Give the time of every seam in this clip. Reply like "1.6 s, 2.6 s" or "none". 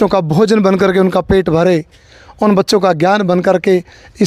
none